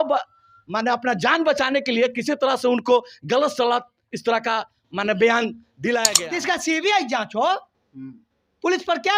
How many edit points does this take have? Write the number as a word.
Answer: one